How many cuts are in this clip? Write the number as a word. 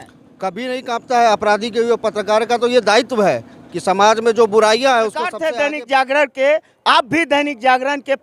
one